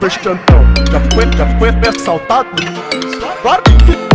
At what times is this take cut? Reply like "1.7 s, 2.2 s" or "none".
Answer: none